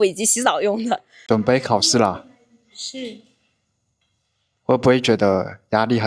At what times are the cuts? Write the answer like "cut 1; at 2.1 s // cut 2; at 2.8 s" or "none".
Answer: cut 1; at 1.1 s